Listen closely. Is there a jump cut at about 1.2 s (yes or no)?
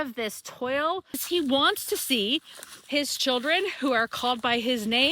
yes